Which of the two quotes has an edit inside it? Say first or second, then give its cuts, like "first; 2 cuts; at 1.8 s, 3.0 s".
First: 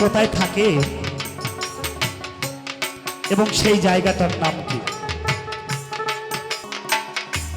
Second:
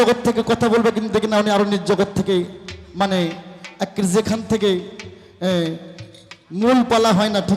first; 1 cut; at 6.6 s